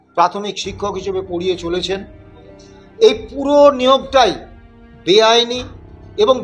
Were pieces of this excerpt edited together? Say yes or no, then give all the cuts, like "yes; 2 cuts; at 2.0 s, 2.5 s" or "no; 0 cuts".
no; 0 cuts